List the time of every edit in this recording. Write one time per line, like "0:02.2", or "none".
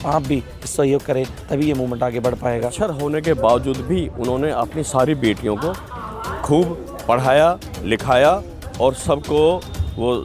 0:02.7